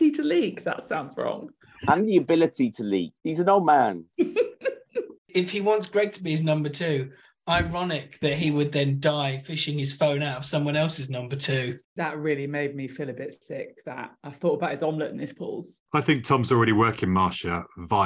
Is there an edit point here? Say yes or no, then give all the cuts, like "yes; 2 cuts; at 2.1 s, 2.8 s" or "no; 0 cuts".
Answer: yes; 3 cuts; at 5.1 s, 11.8 s, 15.8 s